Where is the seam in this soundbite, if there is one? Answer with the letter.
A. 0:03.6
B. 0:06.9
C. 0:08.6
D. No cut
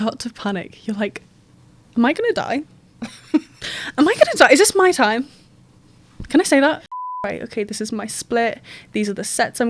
B